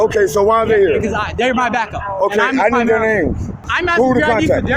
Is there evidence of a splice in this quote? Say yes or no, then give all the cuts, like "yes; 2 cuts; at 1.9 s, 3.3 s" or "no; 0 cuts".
yes; 1 cut; at 3.7 s